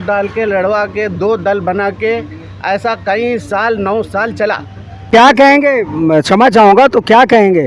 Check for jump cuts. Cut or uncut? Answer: cut